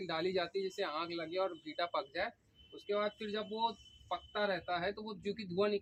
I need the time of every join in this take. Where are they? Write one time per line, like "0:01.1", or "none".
none